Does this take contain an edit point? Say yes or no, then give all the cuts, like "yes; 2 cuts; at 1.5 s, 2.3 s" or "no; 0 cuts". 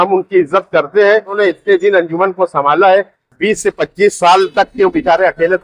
yes; 1 cut; at 1.4 s